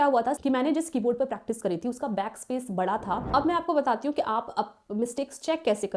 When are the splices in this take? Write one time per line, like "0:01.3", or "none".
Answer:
0:03.2